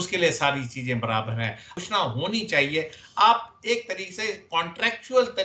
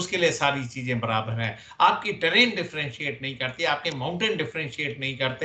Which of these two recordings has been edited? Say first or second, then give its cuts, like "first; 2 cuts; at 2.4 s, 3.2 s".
first; 1 cut; at 1.7 s